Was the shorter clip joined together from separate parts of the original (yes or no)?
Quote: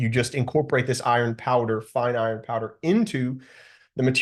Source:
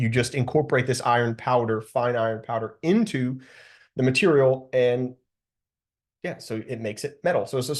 no